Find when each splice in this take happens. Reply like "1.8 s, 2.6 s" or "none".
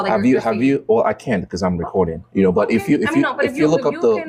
none